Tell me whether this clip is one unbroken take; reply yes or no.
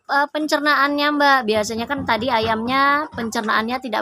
yes